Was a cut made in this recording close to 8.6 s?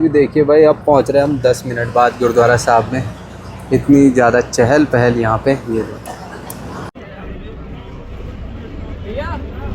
no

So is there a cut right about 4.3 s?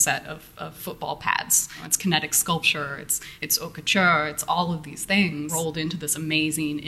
no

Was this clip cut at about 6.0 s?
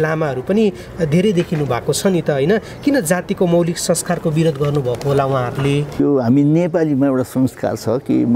yes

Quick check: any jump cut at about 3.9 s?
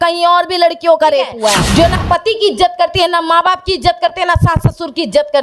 no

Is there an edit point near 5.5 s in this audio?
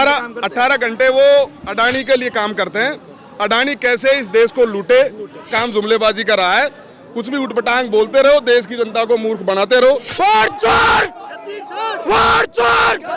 yes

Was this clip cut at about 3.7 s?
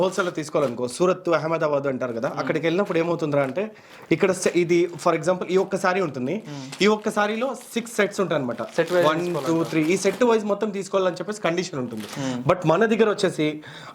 no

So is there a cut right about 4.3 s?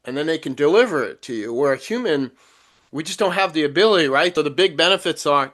yes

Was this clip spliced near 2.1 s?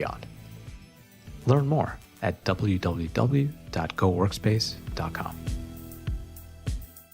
no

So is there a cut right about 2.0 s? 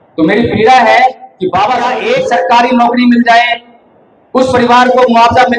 yes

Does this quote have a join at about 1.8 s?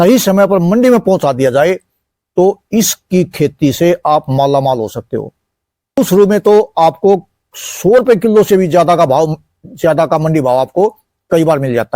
no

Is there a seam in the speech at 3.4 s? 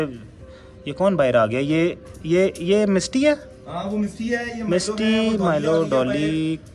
no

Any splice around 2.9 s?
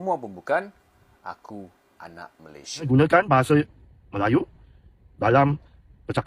yes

